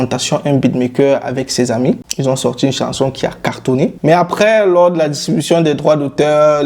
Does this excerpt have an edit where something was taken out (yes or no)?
yes